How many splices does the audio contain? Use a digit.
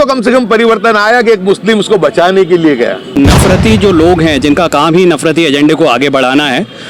1